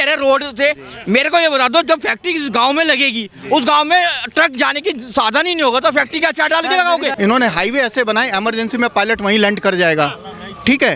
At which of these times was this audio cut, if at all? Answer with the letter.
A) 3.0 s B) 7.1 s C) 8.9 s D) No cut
B